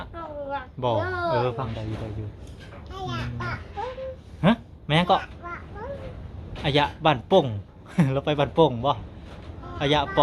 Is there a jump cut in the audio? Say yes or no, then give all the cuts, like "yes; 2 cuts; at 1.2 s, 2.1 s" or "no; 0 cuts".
yes; 1 cut; at 1.6 s